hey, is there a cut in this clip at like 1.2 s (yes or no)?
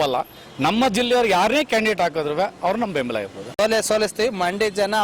no